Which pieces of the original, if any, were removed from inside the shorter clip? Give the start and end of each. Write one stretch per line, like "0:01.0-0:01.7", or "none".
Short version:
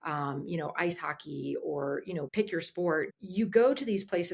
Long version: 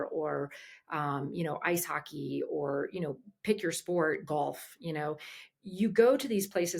0:03.1-0:03.4
0:04.2-0:05.5